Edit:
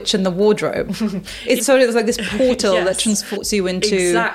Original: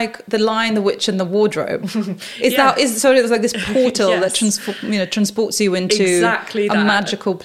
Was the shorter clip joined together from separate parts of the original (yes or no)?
yes